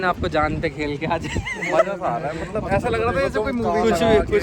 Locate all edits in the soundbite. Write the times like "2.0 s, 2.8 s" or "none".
none